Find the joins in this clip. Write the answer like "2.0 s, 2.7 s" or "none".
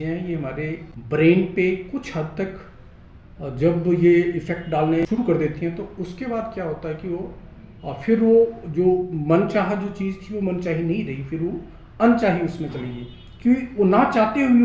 0.9 s, 5.0 s